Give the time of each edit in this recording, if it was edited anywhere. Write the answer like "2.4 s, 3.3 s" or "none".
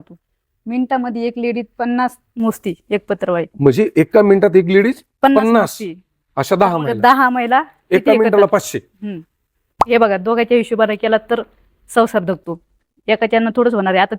9.8 s